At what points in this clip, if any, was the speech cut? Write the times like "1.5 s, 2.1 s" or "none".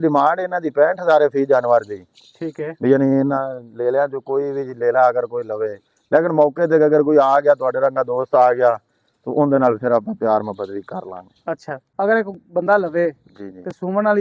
11.8 s